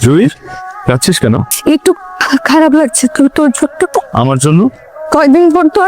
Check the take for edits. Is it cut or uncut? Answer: cut